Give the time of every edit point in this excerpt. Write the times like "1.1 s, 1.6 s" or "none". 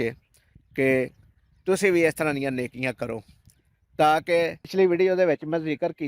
4.7 s